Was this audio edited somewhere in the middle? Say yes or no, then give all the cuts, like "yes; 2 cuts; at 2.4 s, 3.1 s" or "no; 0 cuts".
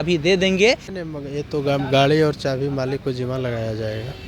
yes; 1 cut; at 0.9 s